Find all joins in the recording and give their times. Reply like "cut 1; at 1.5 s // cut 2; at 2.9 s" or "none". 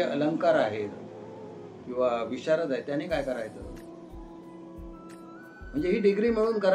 none